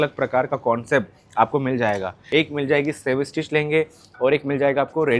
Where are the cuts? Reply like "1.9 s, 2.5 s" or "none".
2.1 s